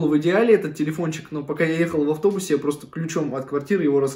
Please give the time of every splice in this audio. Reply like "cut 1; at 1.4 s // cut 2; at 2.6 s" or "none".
none